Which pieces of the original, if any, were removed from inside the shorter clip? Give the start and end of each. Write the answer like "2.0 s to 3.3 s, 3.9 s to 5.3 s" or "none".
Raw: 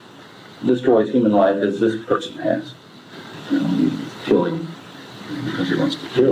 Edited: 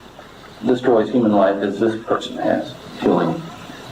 2.9 s to 4.1 s